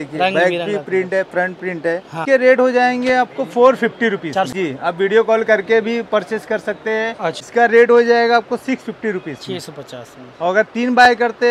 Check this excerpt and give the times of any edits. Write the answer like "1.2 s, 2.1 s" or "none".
2.2 s, 4.5 s, 7.4 s

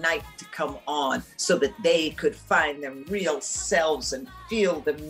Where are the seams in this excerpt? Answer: 3.0 s

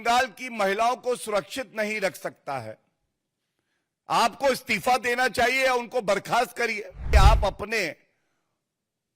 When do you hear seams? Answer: 7.1 s

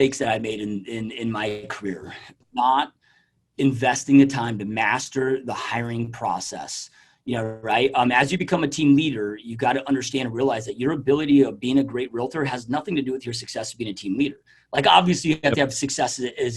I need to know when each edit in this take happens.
2.3 s

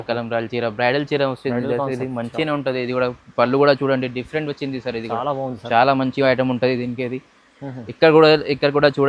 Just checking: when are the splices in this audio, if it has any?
none

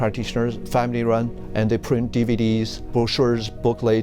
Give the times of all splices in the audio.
1.4 s, 2.9 s

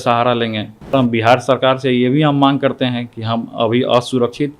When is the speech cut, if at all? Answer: 0.9 s

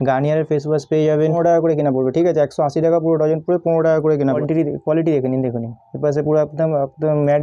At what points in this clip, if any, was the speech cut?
1.3 s, 4.4 s

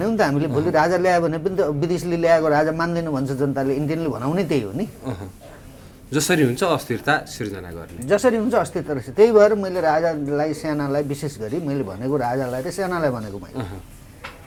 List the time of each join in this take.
none

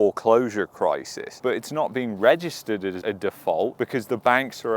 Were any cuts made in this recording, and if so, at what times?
1.2 s, 3.0 s

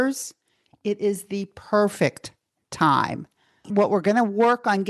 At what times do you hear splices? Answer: 3.7 s

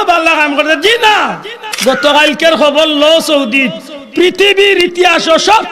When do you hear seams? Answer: 1.7 s

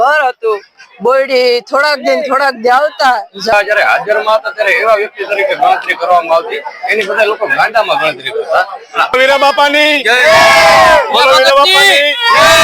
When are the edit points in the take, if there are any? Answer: 3.5 s, 9.1 s

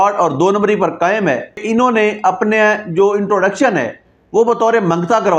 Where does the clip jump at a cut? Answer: 1.6 s

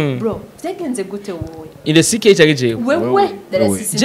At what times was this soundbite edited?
none

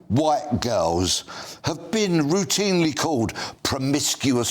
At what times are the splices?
none

